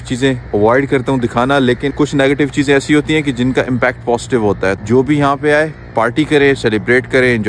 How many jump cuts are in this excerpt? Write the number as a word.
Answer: two